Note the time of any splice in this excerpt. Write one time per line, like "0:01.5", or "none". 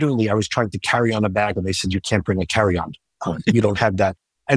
none